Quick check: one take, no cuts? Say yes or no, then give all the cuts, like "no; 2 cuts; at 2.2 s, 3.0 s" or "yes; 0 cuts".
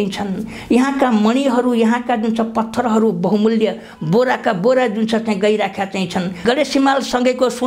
no; 1 cut; at 6.4 s